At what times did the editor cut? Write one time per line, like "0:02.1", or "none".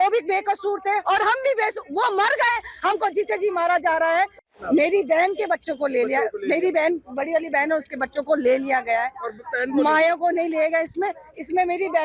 0:04.4

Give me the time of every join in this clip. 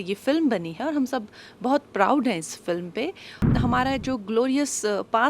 0:03.5

